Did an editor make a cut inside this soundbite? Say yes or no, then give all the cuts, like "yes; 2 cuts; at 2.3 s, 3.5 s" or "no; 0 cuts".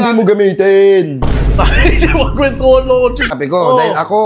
yes; 1 cut; at 3.3 s